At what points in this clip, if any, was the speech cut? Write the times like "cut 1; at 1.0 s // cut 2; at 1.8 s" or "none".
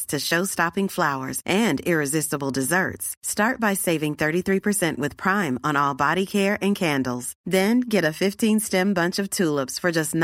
none